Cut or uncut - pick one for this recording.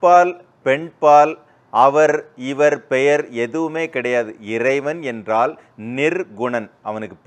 uncut